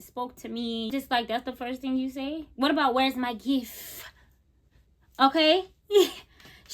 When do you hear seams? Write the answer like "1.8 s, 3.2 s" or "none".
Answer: 0.9 s